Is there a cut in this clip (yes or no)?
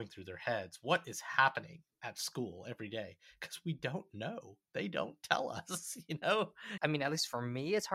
yes